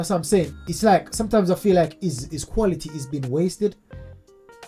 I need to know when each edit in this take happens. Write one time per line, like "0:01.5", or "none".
none